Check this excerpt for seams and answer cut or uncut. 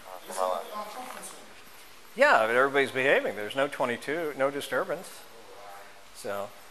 uncut